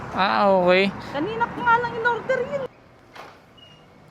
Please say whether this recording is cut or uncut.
cut